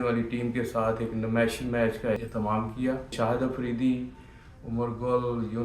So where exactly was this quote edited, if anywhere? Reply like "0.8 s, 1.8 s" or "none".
2.2 s, 3.1 s